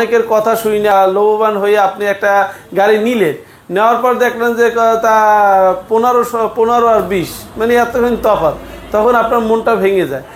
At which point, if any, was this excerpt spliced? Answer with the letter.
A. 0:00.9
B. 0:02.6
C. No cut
A